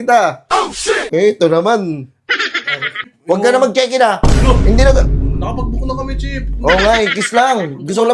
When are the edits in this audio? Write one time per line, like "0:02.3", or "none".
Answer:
0:03.1